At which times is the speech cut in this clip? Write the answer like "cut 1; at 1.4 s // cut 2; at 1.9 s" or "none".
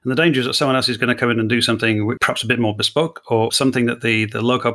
cut 1; at 2.2 s // cut 2; at 3.5 s

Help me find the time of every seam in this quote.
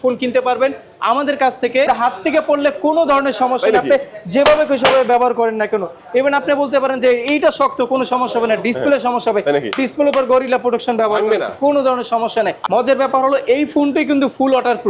cut 1; at 1.9 s // cut 2; at 12.6 s

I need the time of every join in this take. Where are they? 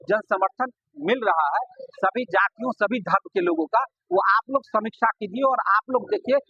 none

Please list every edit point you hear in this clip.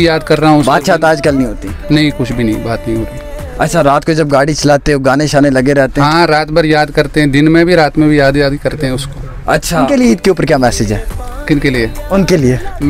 cut 1; at 9.8 s

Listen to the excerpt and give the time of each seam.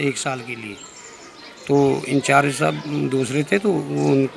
none

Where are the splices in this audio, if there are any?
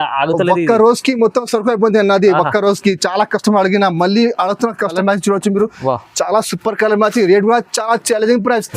cut 1; at 4.9 s

